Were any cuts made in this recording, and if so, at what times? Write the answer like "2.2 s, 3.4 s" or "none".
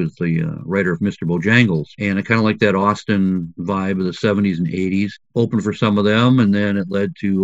5.2 s